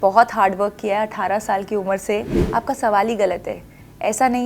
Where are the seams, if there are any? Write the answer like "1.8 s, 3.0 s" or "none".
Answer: 2.4 s